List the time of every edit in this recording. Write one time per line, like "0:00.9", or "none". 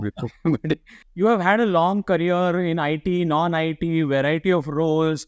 0:01.0